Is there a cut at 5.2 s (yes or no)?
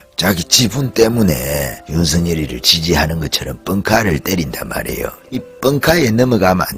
yes